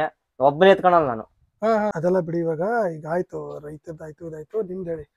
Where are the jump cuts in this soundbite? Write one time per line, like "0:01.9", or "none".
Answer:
0:01.9